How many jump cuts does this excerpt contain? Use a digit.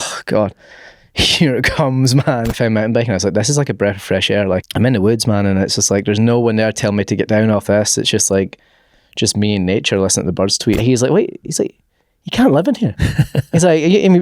3